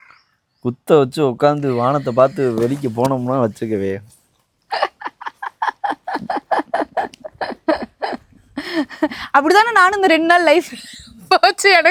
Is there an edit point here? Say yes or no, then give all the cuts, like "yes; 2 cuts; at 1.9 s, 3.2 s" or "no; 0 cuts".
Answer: no; 0 cuts